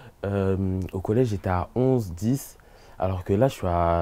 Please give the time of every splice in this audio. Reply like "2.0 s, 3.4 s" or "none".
none